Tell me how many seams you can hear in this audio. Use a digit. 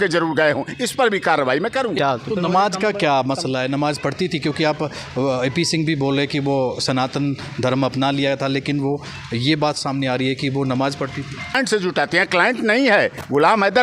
2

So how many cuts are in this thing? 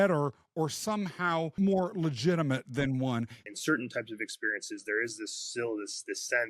2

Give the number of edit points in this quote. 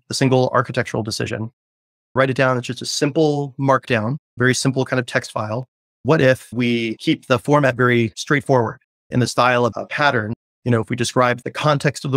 2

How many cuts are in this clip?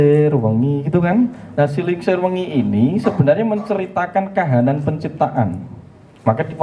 0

